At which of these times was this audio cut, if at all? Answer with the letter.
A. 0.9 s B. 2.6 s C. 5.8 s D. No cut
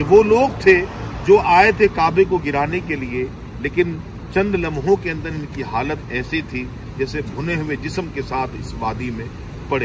D